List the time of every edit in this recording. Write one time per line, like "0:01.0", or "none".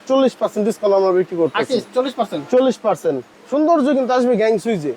0:03.3